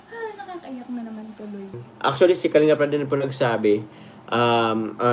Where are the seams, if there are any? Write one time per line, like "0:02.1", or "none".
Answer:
0:01.8